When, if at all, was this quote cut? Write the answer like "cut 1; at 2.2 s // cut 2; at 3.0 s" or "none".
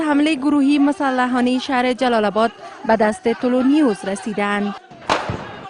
none